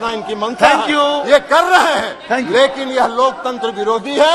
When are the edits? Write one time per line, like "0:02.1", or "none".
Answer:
none